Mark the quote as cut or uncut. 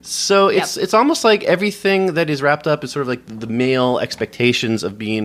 uncut